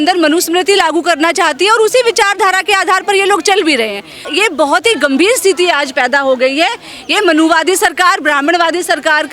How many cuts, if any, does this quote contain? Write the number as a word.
one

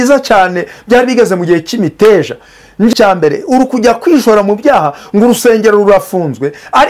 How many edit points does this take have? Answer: one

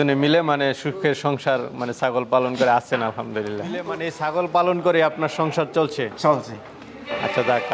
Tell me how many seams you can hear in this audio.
one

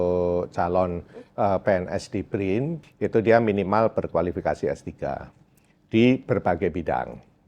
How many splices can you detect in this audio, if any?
one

